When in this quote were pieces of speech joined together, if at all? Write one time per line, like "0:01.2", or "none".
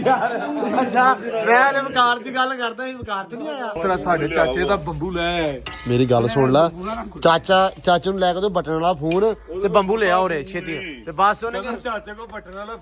0:03.8